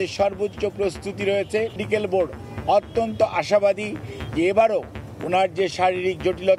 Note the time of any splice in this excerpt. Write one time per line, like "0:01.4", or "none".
0:01.8